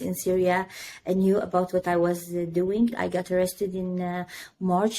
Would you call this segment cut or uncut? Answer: cut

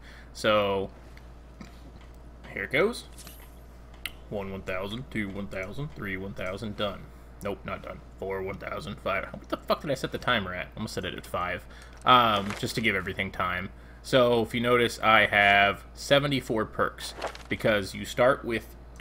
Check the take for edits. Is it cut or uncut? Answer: cut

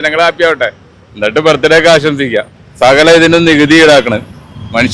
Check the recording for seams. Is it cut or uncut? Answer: cut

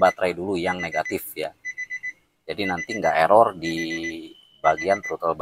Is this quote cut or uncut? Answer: uncut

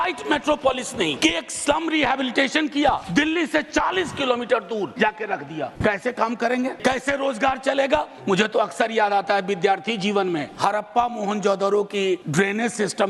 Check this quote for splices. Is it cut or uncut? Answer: cut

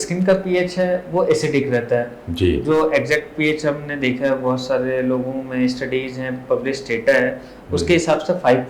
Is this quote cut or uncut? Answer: uncut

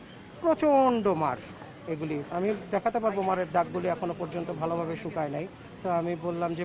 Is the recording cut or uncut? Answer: cut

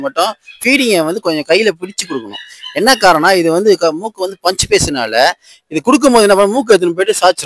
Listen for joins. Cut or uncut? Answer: uncut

